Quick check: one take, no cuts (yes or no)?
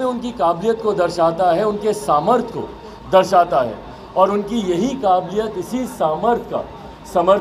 yes